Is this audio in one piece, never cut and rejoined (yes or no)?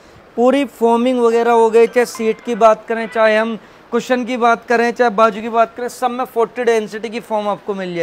yes